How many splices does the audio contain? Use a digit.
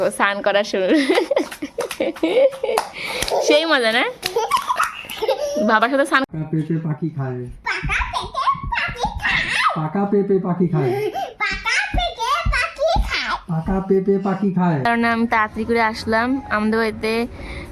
2